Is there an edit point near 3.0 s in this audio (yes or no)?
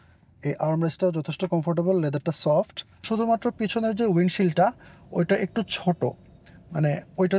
yes